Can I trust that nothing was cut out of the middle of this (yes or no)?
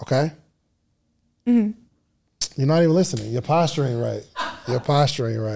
yes